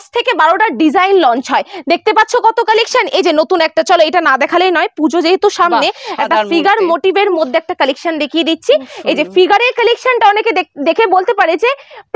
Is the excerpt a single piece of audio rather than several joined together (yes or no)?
yes